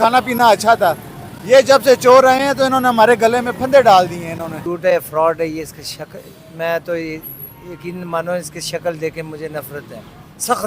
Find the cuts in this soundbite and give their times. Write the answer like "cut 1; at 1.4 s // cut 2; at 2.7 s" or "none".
cut 1; at 4.6 s

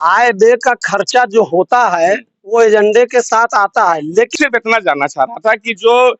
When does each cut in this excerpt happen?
cut 1; at 4.3 s

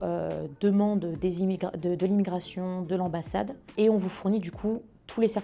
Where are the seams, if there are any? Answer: cut 1; at 3.6 s

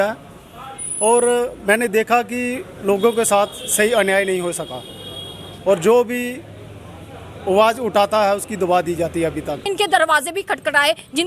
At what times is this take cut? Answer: cut 1; at 9.7 s

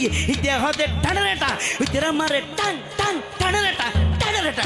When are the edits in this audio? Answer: none

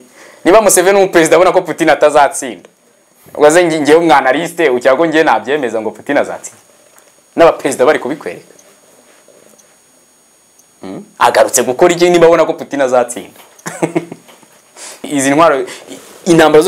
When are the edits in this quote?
cut 1; at 15.0 s

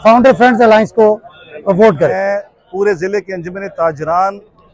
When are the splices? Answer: cut 1; at 2.1 s

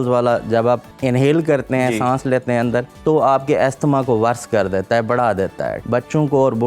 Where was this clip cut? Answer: cut 1; at 0.9 s // cut 2; at 2.9 s // cut 3; at 5.8 s

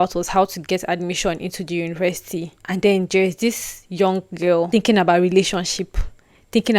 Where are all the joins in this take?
cut 1; at 2.6 s // cut 2; at 4.7 s

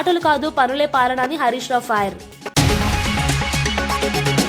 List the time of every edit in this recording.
cut 1; at 2.3 s

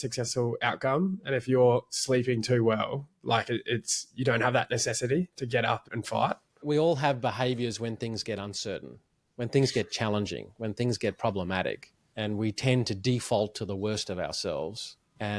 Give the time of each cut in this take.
cut 1; at 6.6 s

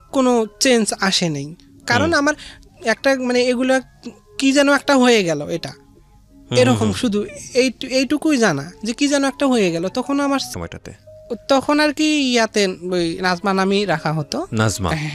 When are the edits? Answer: cut 1; at 10.5 s

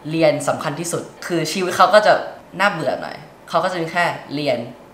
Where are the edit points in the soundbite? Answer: cut 1; at 1.1 s // cut 2; at 2.4 s

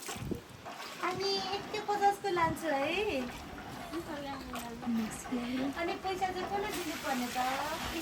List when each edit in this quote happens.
none

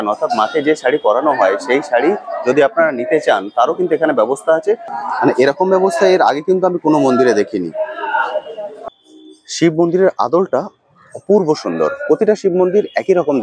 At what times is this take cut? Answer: cut 1; at 4.9 s // cut 2; at 8.8 s

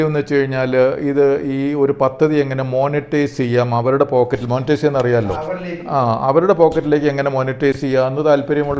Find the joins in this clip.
none

